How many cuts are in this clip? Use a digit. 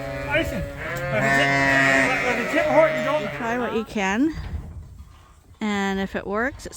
1